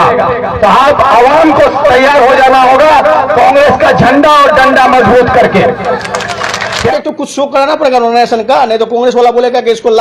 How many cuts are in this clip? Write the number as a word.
one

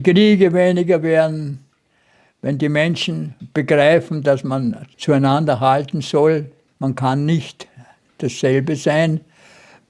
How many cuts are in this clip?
three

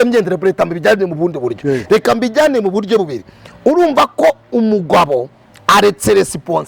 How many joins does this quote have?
zero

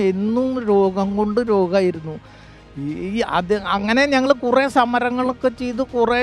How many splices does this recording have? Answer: zero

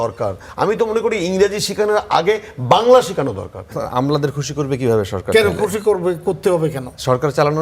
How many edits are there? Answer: one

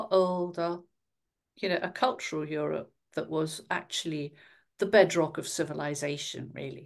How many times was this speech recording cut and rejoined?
zero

